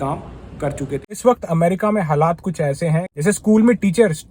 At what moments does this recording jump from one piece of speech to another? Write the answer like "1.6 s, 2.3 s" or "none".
1.0 s, 3.1 s